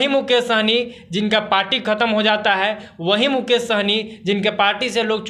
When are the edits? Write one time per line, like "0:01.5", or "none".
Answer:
none